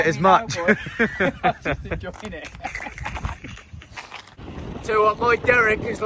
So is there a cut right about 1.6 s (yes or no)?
no